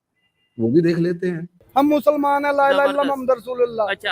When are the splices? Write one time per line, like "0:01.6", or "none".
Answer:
0:01.5